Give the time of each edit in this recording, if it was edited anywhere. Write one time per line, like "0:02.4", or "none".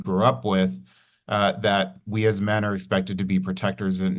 none